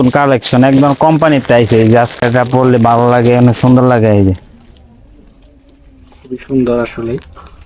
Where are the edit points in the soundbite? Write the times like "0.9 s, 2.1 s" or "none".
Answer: 2.2 s